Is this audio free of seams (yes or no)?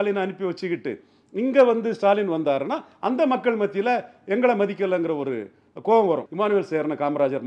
no